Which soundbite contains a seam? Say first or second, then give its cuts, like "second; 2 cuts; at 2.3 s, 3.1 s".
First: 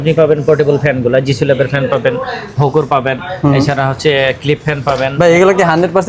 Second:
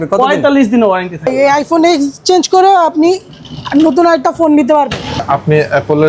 second; 2 cuts; at 1.3 s, 5.2 s